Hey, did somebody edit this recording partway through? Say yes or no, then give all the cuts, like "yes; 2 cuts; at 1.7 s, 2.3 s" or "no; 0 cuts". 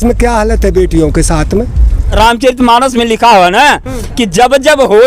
yes; 1 cut; at 2.1 s